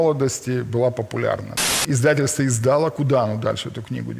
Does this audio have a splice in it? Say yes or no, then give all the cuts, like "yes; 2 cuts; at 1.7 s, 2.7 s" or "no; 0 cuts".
yes; 1 cut; at 1.5 s